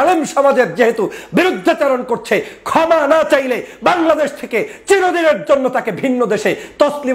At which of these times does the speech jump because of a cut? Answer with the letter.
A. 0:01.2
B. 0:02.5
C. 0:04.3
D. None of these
D